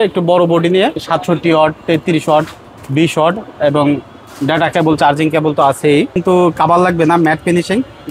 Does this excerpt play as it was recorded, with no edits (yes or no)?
no